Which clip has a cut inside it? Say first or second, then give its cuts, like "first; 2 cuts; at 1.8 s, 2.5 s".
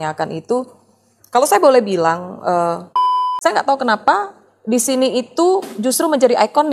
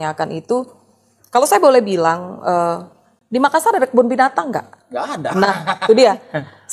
first; 1 cut; at 3.1 s